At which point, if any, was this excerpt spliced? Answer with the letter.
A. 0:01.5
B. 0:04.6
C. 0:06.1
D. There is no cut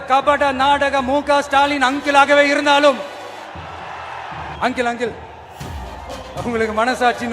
B